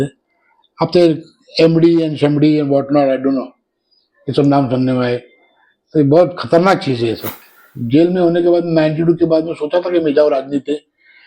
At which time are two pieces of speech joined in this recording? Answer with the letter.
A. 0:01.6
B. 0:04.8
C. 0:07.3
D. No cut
C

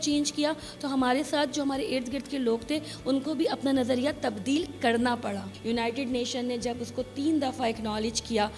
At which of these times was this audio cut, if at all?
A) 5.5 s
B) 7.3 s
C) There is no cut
A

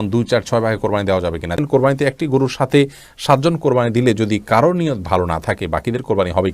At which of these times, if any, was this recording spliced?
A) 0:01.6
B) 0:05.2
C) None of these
A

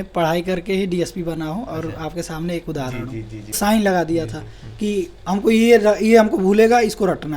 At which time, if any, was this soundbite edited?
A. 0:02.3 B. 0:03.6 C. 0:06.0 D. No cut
B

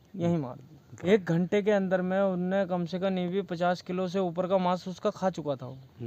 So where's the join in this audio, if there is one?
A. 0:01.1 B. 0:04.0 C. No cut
A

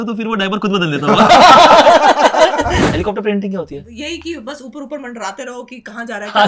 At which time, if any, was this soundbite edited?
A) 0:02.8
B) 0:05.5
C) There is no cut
A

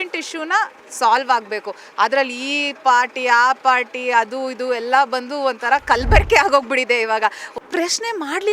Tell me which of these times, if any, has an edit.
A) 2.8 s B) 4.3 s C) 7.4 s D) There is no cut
C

